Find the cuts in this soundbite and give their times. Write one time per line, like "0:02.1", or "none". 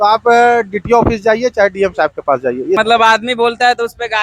0:02.8